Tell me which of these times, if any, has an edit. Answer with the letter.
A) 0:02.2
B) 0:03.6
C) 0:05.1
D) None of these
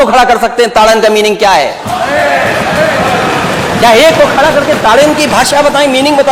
D